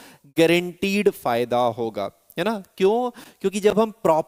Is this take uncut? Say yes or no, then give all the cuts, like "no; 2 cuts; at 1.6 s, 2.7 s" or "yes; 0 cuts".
yes; 0 cuts